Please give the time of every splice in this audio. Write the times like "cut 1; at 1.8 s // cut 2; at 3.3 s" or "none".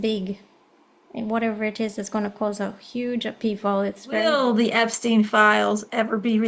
cut 1; at 4.2 s

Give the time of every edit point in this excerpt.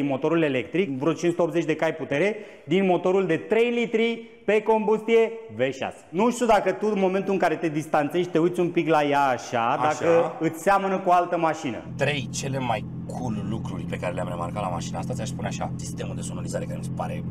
cut 1; at 0.9 s // cut 2; at 6.1 s // cut 3; at 11.7 s // cut 4; at 13.8 s // cut 5; at 15.8 s

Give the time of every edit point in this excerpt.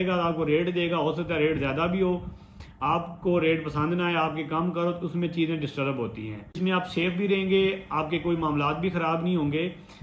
cut 1; at 6.6 s

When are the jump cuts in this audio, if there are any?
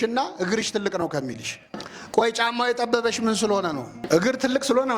cut 1; at 2.2 s // cut 2; at 4.0 s

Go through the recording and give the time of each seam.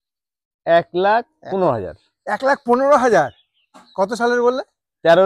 none

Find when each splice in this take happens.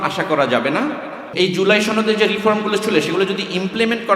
cut 1; at 1.4 s

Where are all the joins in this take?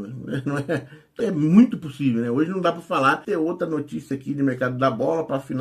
cut 1; at 1.0 s // cut 2; at 3.2 s

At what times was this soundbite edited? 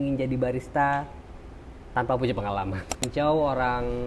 cut 1; at 3.0 s

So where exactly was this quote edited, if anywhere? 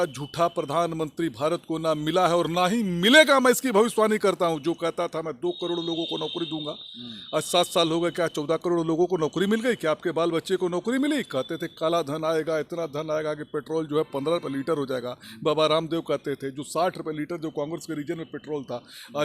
none

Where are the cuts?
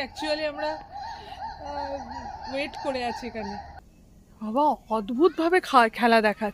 cut 1; at 3.7 s

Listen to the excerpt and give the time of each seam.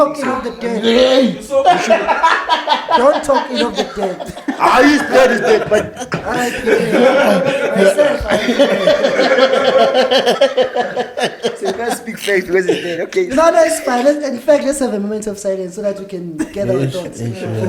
none

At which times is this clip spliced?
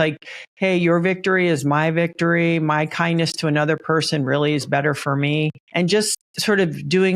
cut 1; at 5.6 s // cut 2; at 6.2 s

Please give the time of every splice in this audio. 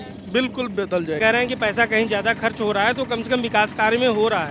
cut 1; at 1.2 s

